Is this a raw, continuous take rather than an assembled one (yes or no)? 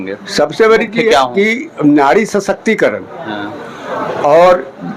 yes